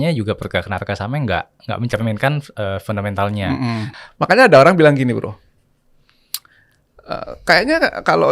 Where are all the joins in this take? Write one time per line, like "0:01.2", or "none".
0:03.9